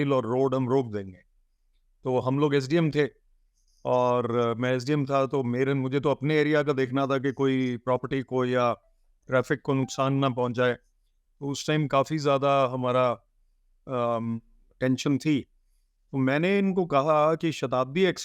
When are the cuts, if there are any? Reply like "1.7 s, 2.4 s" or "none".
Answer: none